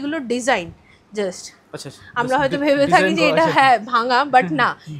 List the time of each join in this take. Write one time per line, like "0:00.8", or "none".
none